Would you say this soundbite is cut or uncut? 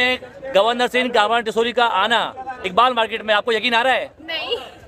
uncut